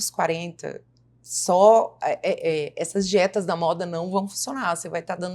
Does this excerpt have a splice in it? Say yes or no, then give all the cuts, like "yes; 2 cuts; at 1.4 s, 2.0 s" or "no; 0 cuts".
no; 0 cuts